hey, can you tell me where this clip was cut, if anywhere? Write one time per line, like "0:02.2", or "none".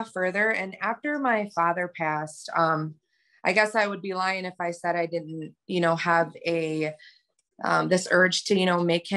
none